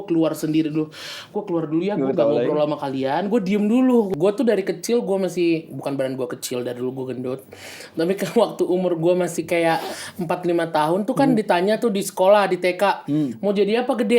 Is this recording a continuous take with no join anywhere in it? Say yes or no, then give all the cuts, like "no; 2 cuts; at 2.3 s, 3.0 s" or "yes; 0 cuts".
no; 1 cut; at 4.1 s